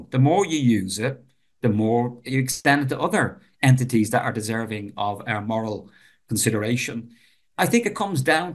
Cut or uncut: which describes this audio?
cut